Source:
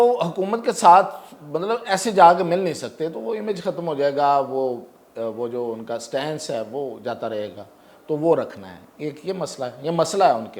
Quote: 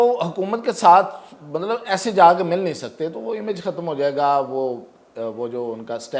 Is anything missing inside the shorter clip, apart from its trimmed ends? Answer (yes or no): no